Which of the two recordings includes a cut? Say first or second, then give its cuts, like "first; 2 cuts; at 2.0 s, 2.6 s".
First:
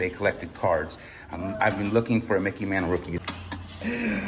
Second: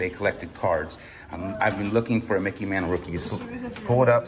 first; 1 cut; at 3.2 s